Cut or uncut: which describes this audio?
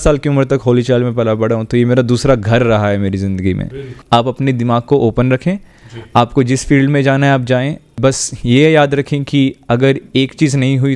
cut